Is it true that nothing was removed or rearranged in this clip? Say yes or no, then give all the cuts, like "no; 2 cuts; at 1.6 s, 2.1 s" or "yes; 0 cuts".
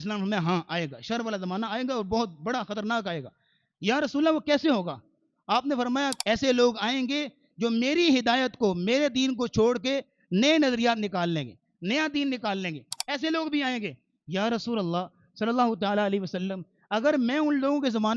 no; 1 cut; at 6.1 s